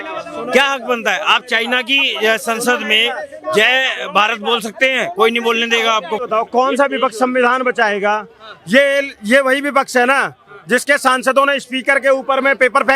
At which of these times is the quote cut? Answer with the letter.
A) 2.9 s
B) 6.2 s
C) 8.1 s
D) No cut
B